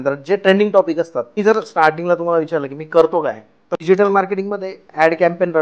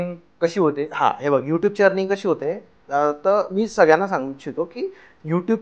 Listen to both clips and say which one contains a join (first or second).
first